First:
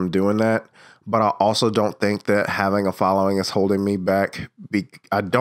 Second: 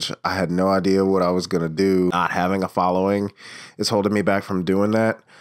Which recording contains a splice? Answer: second; 1 cut; at 2.1 s

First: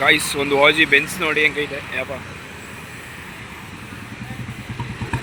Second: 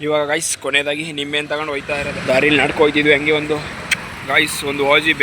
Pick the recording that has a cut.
second; 1 cut; at 2.1 s

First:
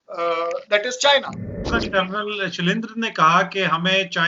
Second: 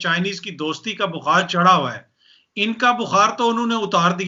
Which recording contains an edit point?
first; 1 cut; at 1.6 s

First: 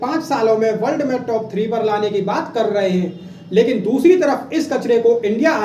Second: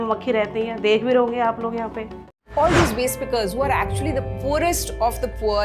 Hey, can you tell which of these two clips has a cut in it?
second; 1 cut; at 2.3 s

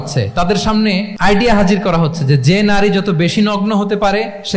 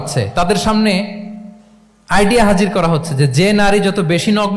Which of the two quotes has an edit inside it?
first; 1 cut; at 1.1 s

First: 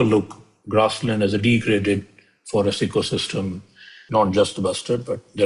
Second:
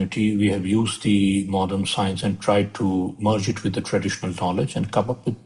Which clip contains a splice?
first; 1 cut; at 4.0 s

